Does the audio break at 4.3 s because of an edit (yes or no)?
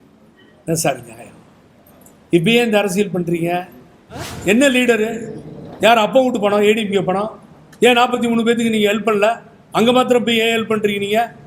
yes